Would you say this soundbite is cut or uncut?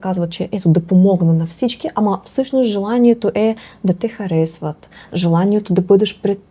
uncut